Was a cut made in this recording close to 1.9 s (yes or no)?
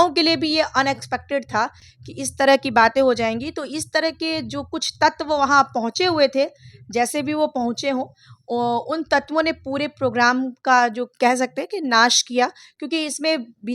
no